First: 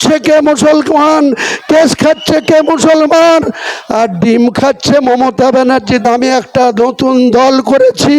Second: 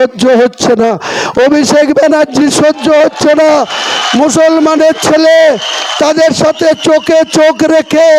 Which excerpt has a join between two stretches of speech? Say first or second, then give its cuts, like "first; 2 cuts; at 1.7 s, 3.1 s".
first; 1 cut; at 6.1 s